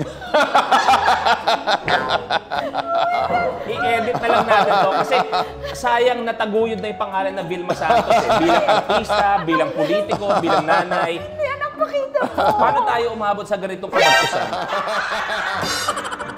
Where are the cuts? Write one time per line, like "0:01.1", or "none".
none